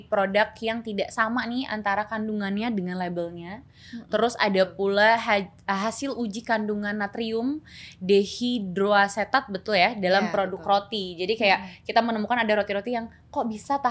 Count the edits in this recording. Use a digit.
0